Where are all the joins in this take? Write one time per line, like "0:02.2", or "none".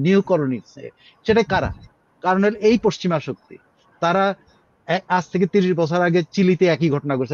none